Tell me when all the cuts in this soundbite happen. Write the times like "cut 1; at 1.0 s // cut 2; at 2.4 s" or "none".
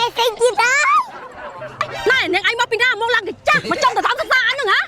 cut 1; at 1.9 s